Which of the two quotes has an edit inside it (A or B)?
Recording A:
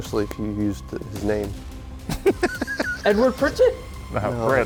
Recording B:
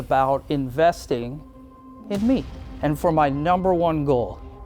B